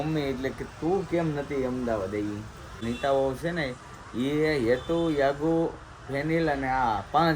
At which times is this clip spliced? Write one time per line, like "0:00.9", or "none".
0:02.8